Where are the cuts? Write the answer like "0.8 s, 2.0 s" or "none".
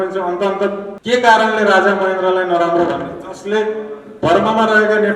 0.9 s